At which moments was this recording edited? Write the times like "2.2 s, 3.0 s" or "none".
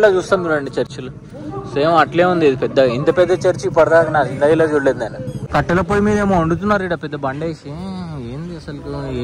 5.3 s